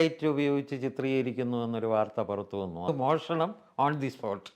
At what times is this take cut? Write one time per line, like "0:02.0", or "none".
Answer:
0:02.9

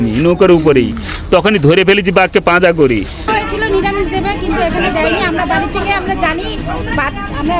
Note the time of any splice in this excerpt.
0:03.3

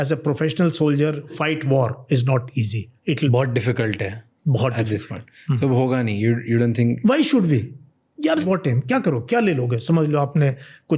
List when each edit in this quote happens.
0:01.3
0:03.3
0:08.4

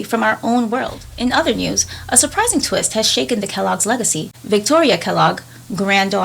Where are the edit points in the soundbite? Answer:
0:01.0

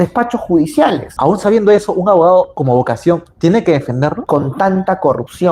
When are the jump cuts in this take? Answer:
0:01.1
0:02.5
0:04.2

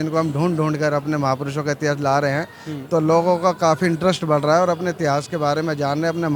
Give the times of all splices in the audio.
none

